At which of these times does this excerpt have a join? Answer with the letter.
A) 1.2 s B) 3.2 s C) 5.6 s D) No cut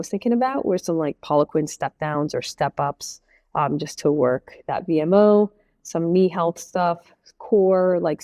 D